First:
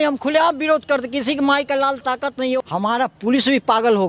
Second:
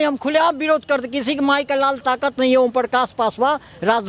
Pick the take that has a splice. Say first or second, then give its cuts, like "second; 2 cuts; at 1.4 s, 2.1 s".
first; 1 cut; at 2.6 s